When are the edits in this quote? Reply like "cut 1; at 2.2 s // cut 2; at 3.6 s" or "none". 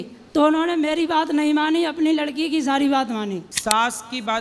cut 1; at 3.5 s